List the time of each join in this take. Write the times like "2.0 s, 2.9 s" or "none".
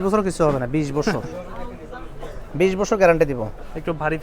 none